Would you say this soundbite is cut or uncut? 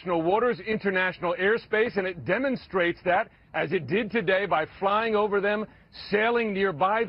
cut